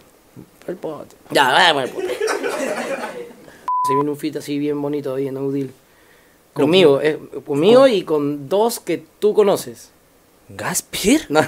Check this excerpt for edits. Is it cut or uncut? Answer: cut